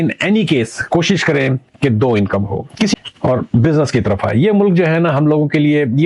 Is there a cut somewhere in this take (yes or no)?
yes